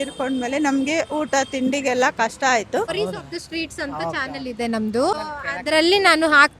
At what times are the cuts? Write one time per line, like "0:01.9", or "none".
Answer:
0:02.9
0:05.1